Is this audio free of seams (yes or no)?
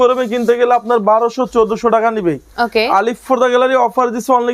yes